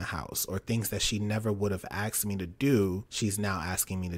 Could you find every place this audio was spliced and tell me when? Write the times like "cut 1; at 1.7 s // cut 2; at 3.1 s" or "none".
cut 1; at 3.1 s